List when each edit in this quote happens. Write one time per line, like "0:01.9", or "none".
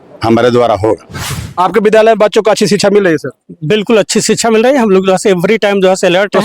0:01.2